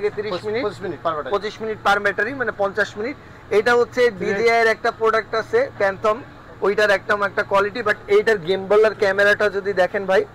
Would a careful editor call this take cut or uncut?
uncut